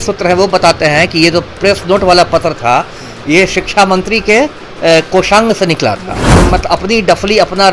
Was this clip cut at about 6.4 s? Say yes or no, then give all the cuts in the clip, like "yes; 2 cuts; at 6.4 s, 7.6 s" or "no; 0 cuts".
yes; 1 cut; at 6.4 s